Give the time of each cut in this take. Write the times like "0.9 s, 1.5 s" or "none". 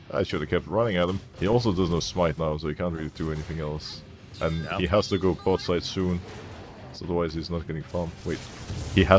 1.3 s

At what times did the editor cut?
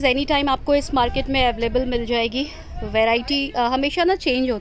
none

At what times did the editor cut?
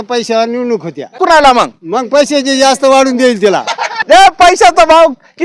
1.1 s, 4.0 s

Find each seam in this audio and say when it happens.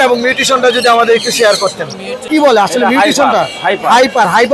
2.2 s

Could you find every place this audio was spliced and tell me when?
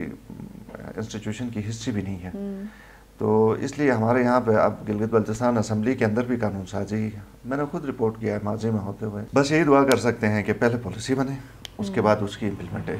9.2 s

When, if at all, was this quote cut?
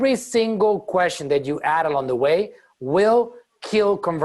none

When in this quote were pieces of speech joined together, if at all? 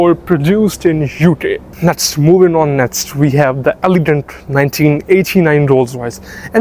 1.7 s

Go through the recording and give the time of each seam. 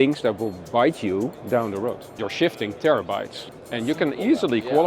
2.2 s, 3.4 s

